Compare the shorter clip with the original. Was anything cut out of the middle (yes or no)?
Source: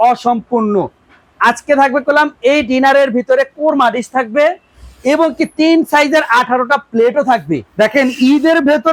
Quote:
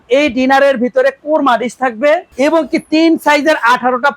yes